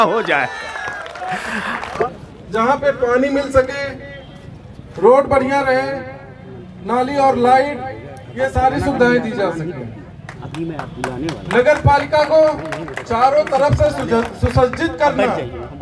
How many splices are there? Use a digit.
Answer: 1